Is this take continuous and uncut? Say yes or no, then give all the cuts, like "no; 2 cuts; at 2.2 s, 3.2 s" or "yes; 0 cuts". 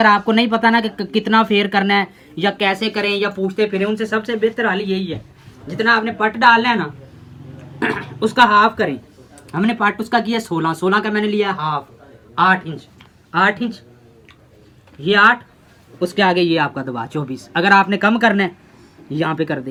yes; 0 cuts